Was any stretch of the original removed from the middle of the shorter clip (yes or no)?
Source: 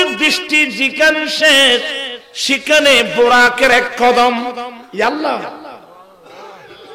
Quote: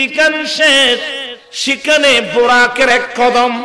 no